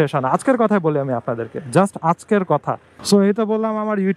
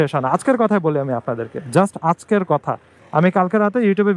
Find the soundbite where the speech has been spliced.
first; 1 cut; at 2.9 s

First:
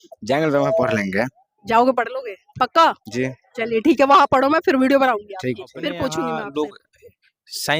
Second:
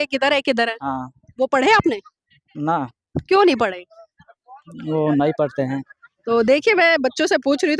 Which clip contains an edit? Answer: first; 1 cut; at 6.3 s

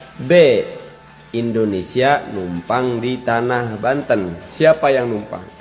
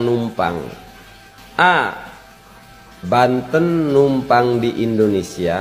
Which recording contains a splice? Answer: first; 1 cut; at 4.4 s

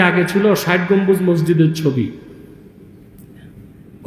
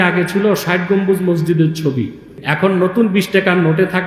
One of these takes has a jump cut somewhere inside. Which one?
second; 1 cut; at 2.4 s

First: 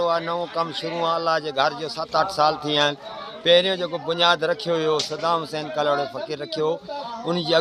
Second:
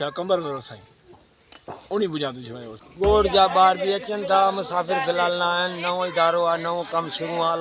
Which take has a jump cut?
second; 1 cut; at 2.8 s

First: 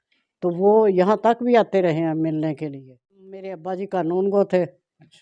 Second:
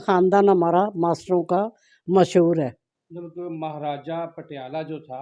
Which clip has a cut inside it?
first; 1 cut; at 3.6 s

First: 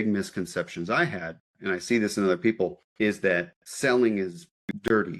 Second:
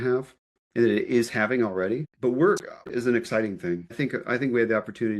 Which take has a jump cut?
second; 3 cuts; at 2.1 s, 2.9 s, 3.9 s

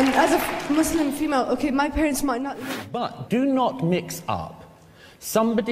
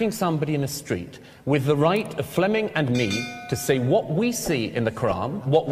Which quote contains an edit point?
first; 1 cut; at 2.6 s

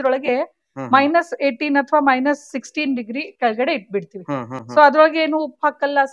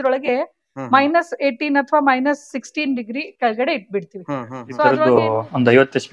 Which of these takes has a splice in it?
second; 1 cut; at 4.5 s

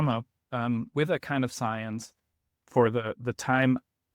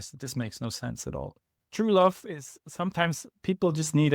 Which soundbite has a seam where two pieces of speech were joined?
second; 1 cut; at 1.6 s

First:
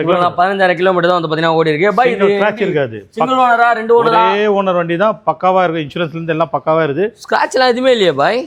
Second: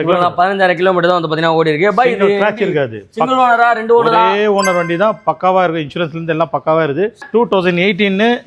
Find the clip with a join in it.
second; 1 cut; at 7.2 s

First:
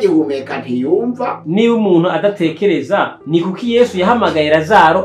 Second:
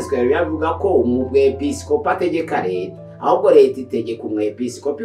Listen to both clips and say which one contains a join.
first; 2 cuts; at 1.4 s, 3.2 s

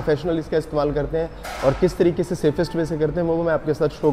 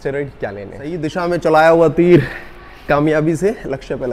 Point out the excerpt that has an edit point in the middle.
second; 1 cut; at 1.0 s

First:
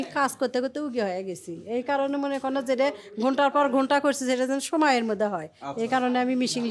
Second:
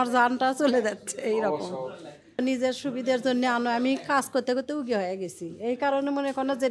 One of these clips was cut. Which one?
second; 1 cut; at 2.4 s

